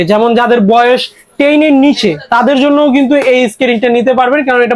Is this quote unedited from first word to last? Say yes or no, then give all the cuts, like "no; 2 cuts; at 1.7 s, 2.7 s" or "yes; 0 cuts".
yes; 0 cuts